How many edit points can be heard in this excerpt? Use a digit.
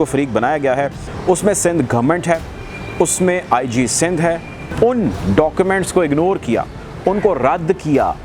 1